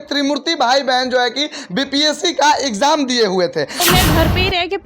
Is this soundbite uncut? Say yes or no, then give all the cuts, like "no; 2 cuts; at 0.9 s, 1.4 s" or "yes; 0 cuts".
no; 1 cut; at 3.8 s